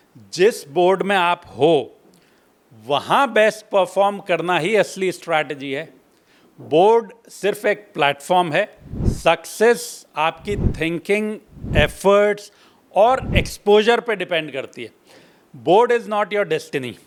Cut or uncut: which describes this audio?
uncut